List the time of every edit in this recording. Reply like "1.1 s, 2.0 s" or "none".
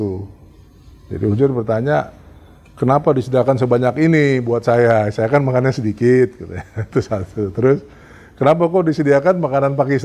none